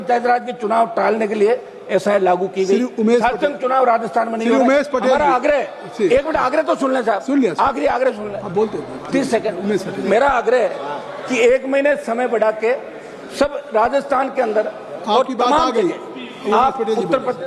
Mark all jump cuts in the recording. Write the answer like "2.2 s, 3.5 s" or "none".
none

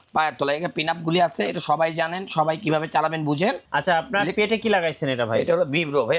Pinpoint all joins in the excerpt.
3.6 s

